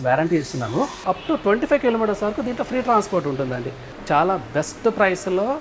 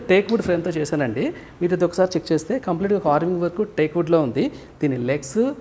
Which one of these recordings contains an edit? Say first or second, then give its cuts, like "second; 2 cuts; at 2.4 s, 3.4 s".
first; 2 cuts; at 1.1 s, 3.9 s